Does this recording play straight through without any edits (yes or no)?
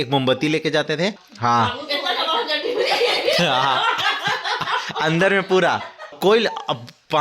no